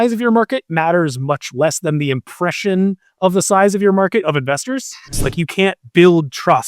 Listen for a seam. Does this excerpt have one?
yes; 1 cut; at 5.2 s

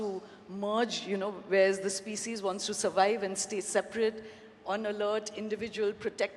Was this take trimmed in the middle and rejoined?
no; 0 cuts

